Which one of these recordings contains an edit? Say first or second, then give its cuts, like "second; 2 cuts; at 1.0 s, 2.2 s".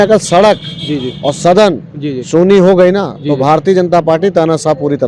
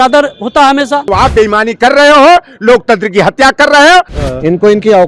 second; 2 cuts; at 1.1 s, 4.2 s